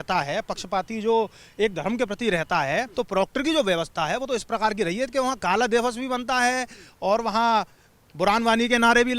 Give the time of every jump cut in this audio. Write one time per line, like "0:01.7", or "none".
0:02.9

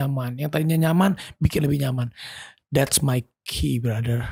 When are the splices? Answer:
none

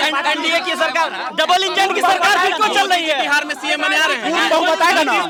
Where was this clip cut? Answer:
none

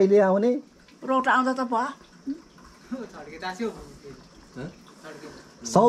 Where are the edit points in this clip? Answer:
none

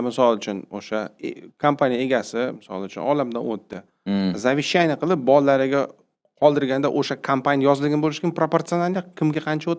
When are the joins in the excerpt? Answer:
none

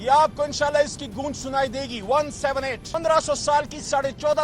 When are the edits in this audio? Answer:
0:03.0

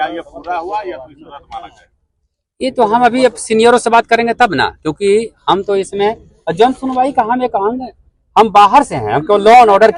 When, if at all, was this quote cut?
none

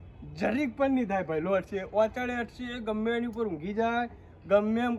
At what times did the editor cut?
none

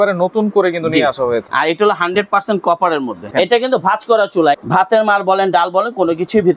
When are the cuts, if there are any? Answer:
0:01.5
0:03.3
0:04.6

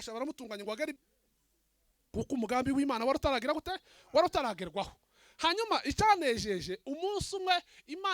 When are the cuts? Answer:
0:01.0

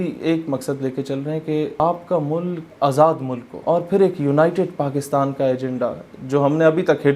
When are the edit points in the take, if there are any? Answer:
0:01.8
0:02.7
0:03.5

